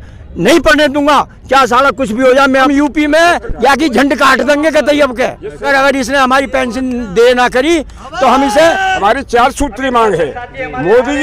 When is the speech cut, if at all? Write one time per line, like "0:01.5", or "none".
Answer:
0:02.7
0:03.5
0:05.7
0:09.0